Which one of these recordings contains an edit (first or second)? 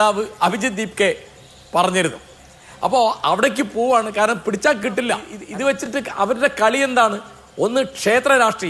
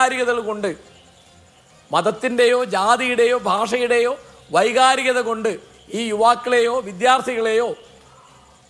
first